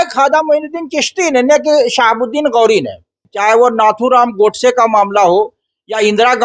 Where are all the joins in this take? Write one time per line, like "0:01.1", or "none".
0:03.3